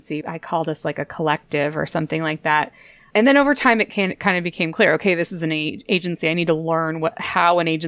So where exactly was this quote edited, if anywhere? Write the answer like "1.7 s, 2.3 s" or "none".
none